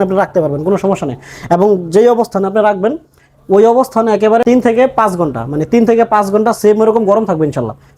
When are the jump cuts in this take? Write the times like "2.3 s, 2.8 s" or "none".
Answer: 4.4 s